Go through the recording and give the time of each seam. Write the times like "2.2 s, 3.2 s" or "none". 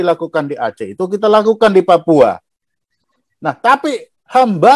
none